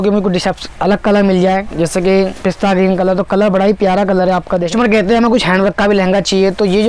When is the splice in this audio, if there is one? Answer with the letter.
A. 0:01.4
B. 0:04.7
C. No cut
B